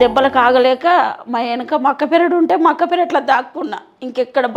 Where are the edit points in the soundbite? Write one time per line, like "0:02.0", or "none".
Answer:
none